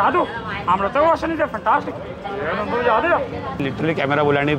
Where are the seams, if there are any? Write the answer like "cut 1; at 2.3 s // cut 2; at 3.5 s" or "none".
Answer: cut 1; at 3.6 s